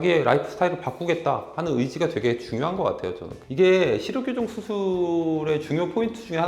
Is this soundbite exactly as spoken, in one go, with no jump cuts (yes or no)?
no